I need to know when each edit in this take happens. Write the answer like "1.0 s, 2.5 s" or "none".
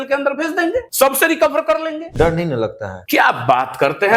0.9 s, 2.1 s, 2.9 s